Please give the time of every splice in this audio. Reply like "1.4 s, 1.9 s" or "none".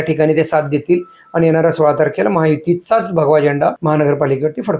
3.8 s